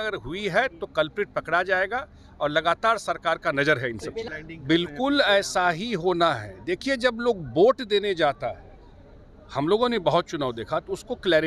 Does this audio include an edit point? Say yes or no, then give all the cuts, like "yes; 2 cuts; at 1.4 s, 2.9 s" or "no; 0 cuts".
yes; 1 cut; at 4.3 s